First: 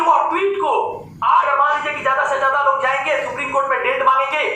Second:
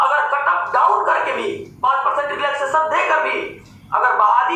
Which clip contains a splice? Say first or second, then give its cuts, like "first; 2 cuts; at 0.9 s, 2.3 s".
first; 1 cut; at 1.4 s